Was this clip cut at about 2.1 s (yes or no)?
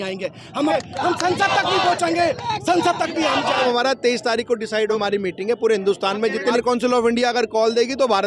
no